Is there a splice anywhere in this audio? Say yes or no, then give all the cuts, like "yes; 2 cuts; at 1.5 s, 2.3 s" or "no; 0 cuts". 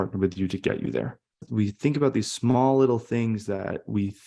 yes; 1 cut; at 1.4 s